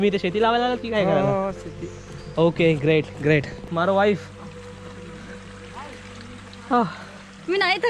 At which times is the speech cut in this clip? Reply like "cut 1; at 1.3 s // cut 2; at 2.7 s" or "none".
cut 1; at 3.6 s